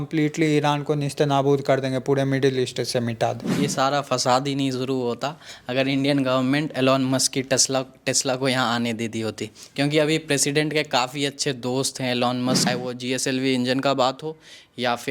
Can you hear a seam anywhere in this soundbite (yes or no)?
yes